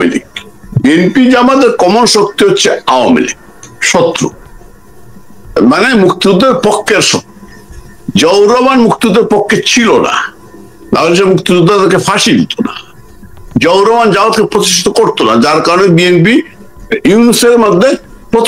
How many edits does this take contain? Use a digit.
0